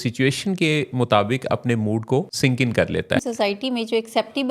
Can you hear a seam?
yes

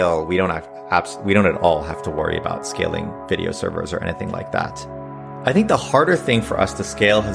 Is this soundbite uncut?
no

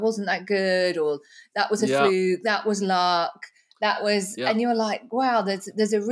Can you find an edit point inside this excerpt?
no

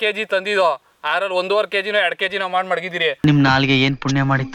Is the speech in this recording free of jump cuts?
yes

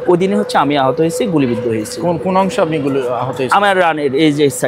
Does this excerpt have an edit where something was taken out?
no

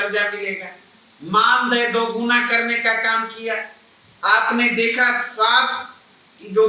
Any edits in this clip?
no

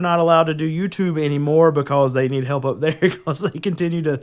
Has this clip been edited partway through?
no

